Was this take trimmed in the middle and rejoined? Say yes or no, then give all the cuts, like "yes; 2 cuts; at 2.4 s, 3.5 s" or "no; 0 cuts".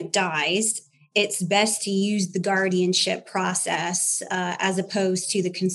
no; 0 cuts